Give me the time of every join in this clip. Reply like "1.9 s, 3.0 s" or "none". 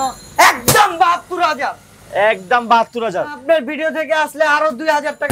3.4 s

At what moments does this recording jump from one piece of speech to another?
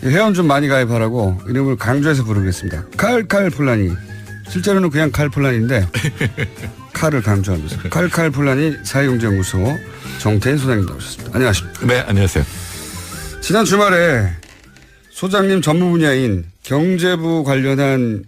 none

